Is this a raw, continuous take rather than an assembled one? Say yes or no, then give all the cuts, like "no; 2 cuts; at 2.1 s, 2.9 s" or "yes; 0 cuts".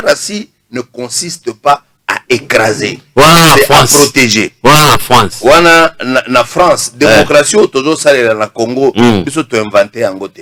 yes; 0 cuts